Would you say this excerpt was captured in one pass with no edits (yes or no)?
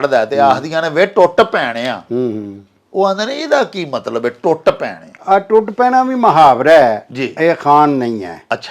yes